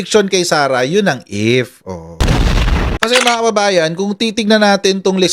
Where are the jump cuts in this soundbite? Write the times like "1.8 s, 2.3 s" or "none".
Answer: 3.2 s